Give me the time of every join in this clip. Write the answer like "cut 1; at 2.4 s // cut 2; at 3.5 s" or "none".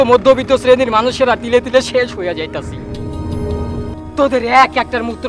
cut 1; at 3.9 s